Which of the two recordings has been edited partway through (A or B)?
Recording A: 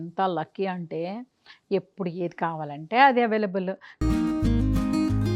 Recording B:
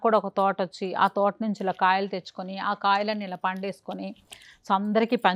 A